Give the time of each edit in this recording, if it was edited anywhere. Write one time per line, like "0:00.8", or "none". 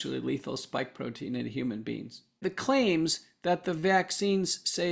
0:02.4